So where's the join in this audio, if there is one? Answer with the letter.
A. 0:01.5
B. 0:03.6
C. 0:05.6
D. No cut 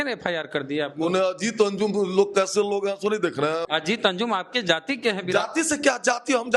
B